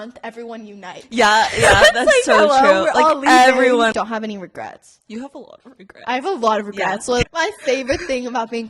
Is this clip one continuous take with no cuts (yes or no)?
no